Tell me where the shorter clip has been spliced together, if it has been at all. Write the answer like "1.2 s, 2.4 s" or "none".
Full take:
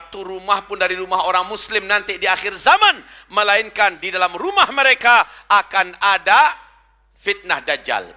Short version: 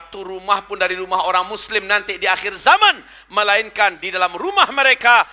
none